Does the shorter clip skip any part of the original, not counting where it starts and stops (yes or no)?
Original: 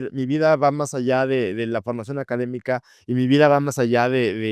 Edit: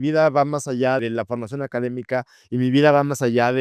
yes